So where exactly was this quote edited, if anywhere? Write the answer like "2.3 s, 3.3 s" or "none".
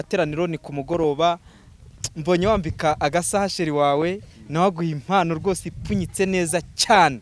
none

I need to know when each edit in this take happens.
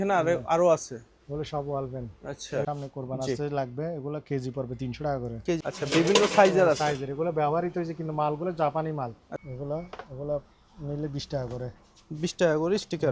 2.6 s, 5.6 s, 9.3 s

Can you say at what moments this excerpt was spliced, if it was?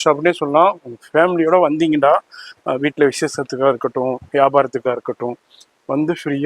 none

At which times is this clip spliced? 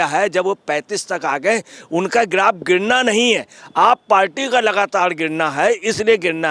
none

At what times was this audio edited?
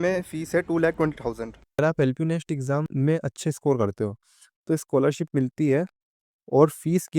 1.8 s

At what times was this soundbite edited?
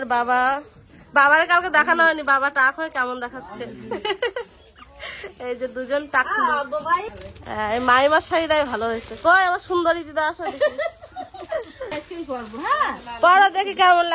7.0 s, 11.9 s

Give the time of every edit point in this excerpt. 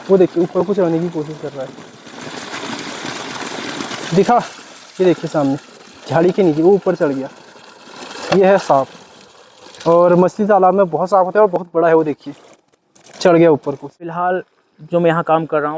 13.8 s

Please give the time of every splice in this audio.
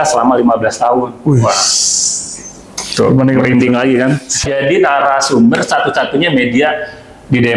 4.4 s

